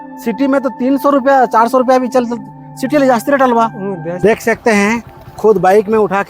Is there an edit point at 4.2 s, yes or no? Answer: yes